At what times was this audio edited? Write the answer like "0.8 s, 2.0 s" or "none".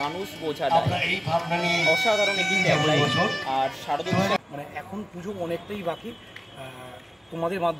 4.4 s